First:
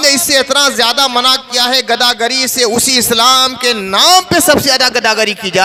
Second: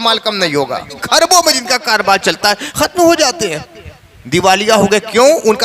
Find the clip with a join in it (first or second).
second